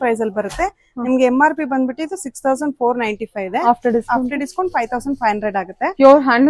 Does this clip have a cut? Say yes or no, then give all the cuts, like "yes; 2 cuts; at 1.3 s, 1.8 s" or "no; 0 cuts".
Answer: no; 0 cuts